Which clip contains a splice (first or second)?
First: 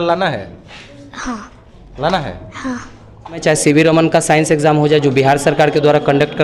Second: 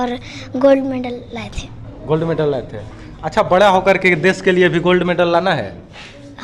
first